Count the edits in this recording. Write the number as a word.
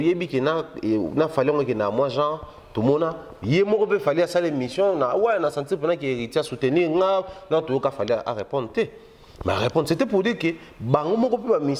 zero